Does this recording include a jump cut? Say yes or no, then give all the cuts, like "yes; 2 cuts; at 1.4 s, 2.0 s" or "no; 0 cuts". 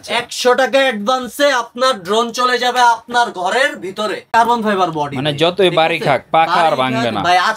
yes; 1 cut; at 4.3 s